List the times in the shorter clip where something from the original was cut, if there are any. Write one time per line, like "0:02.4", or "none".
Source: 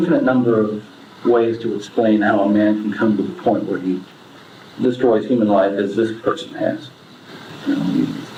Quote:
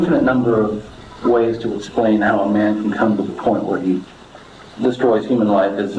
none